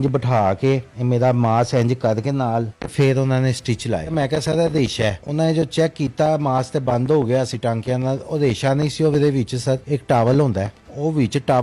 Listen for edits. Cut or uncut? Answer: cut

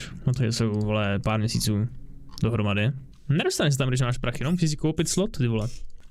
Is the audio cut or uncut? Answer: uncut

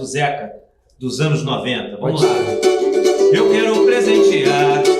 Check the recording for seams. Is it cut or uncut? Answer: uncut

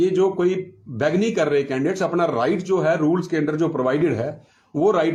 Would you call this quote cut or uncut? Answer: uncut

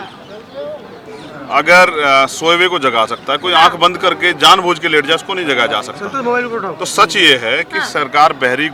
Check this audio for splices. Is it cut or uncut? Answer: uncut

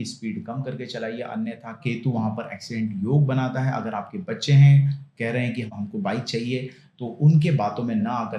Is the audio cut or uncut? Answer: cut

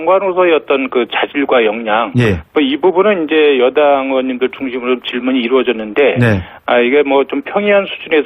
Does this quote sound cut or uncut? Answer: cut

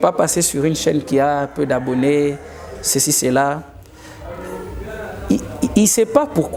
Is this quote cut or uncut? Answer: uncut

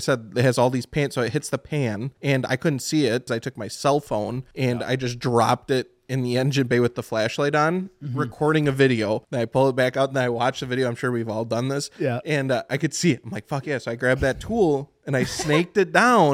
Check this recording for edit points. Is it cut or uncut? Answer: cut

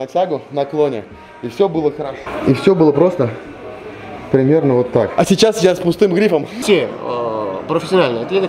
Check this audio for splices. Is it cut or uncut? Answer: cut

